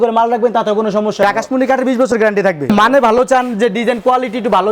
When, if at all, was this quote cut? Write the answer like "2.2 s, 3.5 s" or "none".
1.2 s, 2.7 s